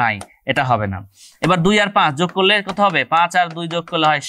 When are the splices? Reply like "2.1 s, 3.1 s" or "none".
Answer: none